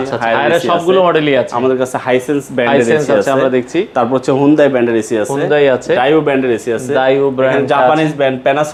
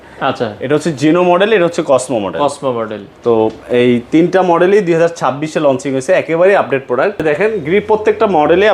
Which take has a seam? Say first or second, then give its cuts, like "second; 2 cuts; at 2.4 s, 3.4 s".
second; 1 cut; at 7.2 s